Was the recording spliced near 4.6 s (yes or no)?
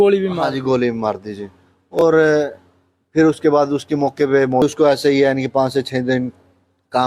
yes